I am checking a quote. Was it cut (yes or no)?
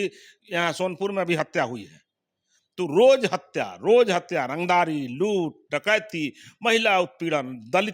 no